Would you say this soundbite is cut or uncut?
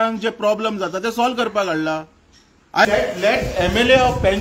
cut